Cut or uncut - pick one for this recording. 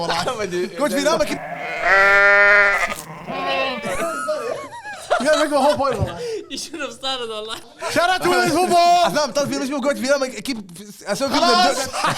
cut